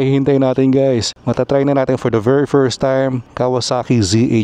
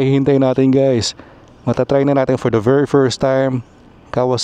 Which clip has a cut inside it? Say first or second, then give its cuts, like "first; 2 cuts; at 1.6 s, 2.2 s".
first; 2 cuts; at 1.2 s, 3.2 s